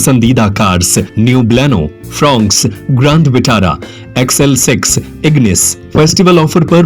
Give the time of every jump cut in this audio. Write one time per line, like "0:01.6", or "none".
0:01.1